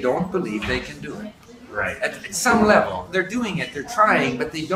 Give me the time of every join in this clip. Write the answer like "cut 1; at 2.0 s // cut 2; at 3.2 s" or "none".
none